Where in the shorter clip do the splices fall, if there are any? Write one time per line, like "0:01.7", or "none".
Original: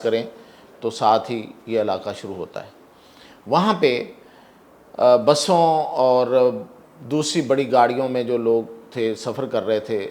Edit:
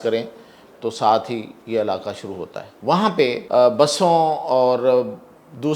0:02.7
0:03.4